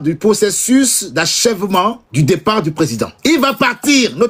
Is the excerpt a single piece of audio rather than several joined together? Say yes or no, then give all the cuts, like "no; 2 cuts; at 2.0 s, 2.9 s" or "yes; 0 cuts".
no; 2 cuts; at 2.0 s, 3.1 s